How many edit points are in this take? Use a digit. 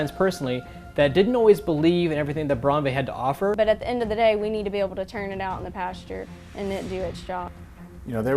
2